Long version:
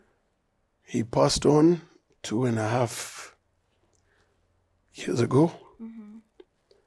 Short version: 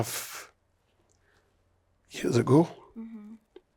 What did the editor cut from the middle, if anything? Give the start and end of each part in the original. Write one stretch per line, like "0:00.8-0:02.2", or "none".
none